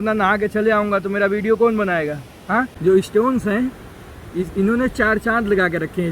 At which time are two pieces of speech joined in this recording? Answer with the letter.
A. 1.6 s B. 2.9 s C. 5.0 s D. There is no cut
B